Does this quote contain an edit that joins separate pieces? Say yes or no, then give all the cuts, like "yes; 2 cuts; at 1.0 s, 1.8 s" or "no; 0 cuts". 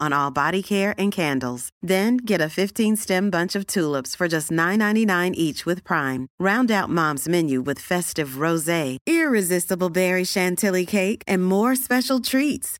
no; 0 cuts